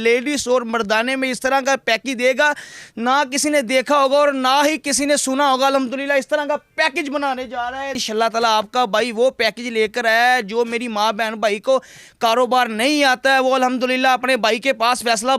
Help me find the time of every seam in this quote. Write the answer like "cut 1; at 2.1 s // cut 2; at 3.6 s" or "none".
cut 1; at 8.0 s